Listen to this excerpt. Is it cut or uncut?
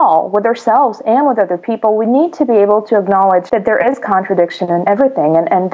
cut